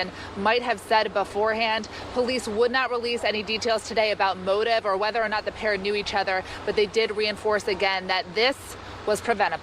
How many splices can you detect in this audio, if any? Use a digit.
1